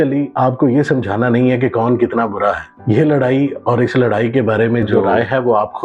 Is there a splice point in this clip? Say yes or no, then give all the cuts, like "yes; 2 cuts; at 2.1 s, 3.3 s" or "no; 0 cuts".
no; 0 cuts